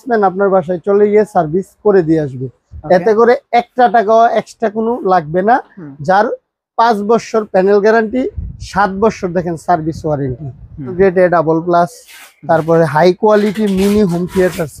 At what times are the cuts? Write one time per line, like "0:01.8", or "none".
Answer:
0:11.0